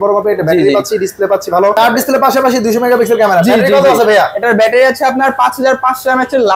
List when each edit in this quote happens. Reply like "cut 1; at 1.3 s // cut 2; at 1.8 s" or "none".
cut 1; at 1.8 s